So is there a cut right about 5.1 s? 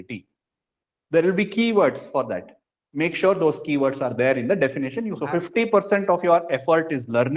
yes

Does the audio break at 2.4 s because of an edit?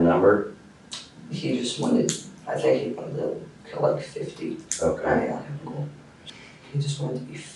no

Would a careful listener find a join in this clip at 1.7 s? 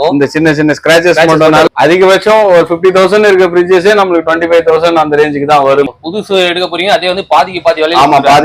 yes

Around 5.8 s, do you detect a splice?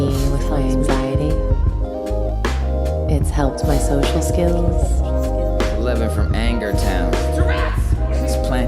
yes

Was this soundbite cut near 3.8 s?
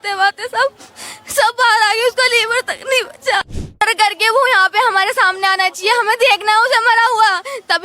yes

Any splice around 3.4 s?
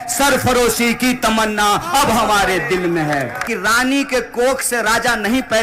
yes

